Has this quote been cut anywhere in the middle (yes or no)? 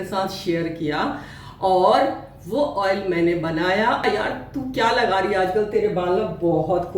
yes